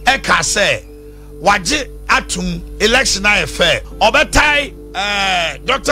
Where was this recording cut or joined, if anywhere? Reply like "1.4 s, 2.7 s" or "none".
3.9 s, 4.8 s